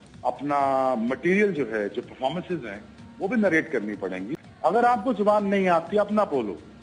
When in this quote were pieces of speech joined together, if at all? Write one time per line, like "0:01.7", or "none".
0:04.7